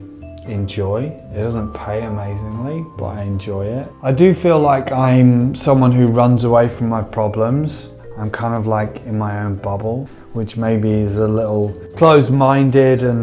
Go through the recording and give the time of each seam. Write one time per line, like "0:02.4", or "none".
0:08.0
0:10.1